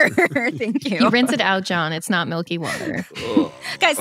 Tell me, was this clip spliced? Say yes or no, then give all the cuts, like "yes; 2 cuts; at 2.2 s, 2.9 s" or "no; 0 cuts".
yes; 1 cut; at 0.9 s